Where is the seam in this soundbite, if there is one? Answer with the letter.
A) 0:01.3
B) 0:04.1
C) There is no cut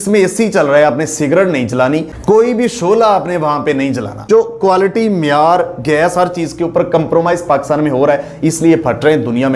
B